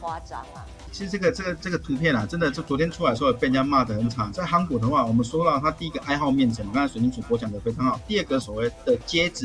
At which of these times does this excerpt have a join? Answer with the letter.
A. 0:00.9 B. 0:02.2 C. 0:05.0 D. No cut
A